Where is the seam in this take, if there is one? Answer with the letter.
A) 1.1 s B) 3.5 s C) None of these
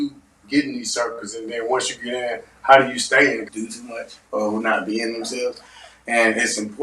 B